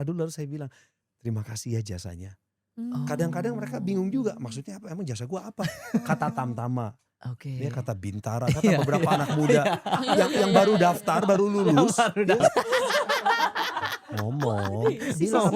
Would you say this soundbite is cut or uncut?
cut